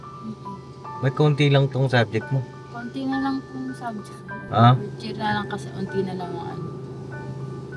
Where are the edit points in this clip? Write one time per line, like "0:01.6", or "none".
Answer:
0:04.4

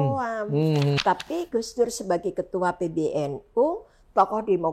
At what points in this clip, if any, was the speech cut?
0:01.0

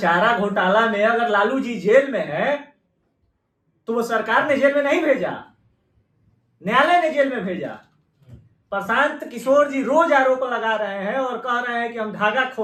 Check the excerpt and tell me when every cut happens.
none

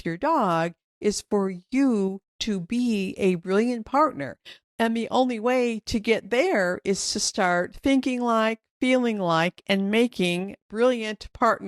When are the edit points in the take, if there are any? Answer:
0:10.6

